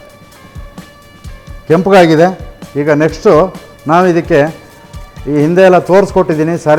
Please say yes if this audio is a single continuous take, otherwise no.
yes